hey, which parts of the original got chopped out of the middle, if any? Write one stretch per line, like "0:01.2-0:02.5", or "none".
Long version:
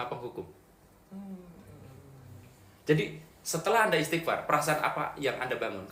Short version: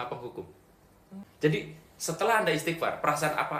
0:01.2-0:02.7